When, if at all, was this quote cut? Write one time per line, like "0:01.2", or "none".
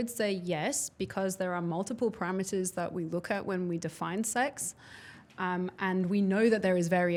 none